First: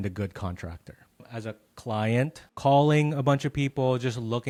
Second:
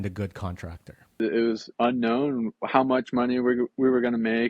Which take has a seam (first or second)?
second